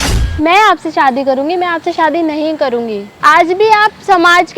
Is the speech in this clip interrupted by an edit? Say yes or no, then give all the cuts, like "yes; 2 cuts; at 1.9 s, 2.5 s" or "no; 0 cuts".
yes; 1 cut; at 3.1 s